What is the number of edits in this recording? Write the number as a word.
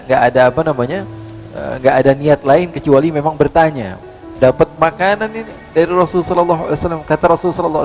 one